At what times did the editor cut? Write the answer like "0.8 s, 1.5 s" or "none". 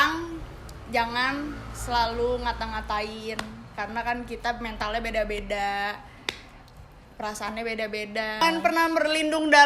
8.4 s